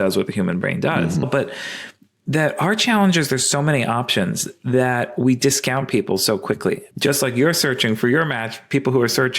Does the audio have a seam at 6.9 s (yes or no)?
yes